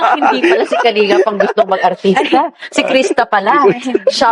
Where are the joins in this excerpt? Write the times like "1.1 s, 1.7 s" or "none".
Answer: 1.2 s